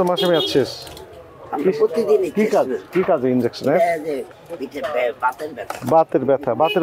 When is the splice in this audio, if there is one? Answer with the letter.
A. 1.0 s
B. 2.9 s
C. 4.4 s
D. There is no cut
C